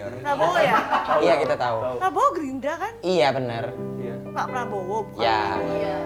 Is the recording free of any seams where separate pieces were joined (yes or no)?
yes